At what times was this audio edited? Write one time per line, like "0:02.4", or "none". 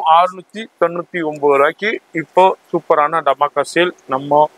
none